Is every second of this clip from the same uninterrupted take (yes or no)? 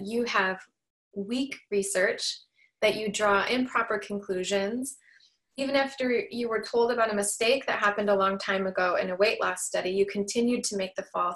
yes